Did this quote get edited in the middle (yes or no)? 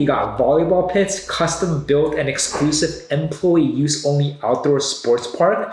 no